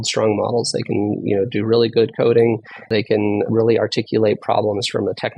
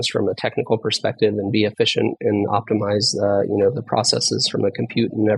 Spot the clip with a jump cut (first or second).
first